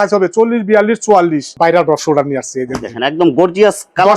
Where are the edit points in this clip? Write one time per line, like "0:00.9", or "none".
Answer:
0:01.5